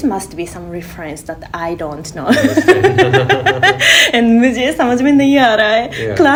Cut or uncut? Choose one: uncut